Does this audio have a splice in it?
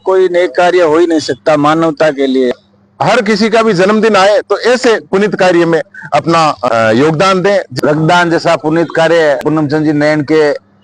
yes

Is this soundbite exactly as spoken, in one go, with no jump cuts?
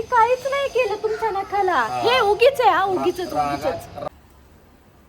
no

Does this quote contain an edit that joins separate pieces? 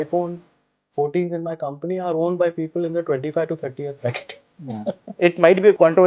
yes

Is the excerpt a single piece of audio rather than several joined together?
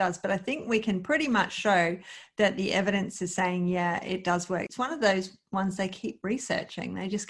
no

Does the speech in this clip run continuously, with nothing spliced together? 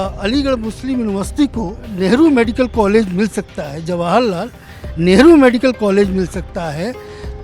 no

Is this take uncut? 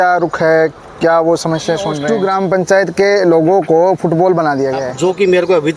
no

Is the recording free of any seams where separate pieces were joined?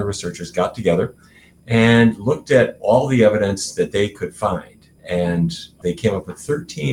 no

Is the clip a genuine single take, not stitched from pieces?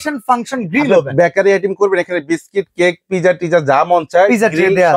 yes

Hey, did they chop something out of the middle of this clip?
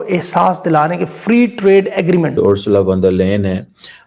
yes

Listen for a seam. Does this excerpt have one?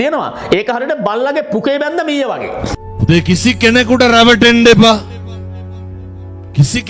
yes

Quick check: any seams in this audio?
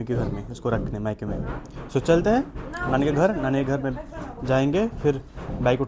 no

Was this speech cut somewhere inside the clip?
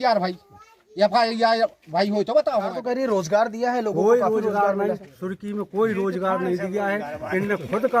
yes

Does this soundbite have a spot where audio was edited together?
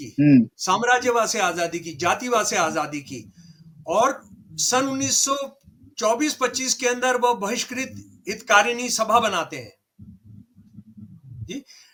no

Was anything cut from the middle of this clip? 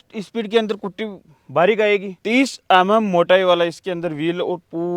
yes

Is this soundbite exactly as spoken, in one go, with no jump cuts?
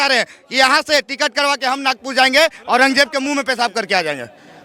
yes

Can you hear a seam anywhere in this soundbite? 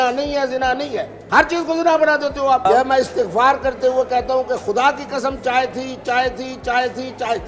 yes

